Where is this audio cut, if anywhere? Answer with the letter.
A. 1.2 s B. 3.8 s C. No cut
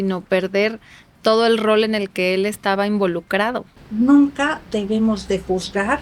B